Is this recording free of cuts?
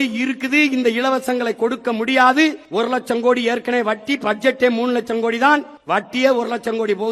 no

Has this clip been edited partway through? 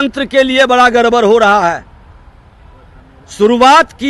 no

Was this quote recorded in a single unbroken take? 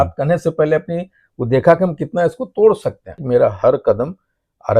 no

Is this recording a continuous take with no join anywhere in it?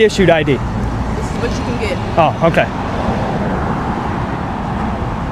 yes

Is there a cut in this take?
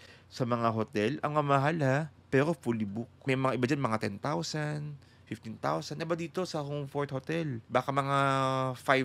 yes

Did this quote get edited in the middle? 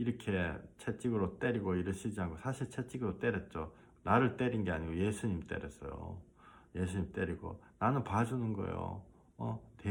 no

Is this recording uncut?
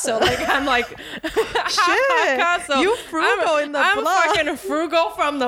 yes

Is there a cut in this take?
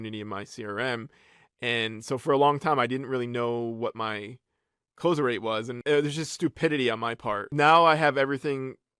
yes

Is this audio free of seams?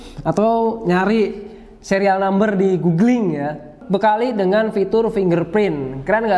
no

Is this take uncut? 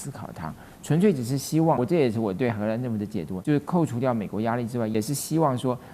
no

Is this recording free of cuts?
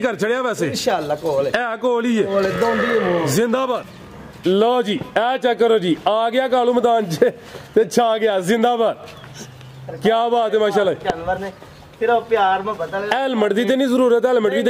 no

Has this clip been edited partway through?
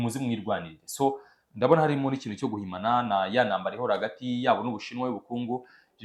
no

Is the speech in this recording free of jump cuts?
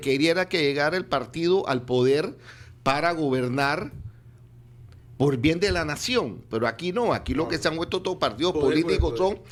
yes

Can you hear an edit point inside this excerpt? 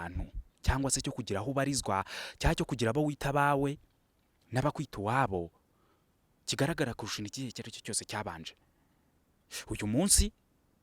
no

